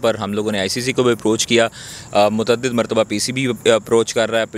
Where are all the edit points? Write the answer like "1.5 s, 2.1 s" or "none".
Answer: none